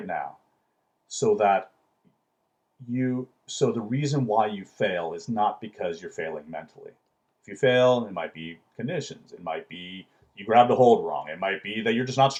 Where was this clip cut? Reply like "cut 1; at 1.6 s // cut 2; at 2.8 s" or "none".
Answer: none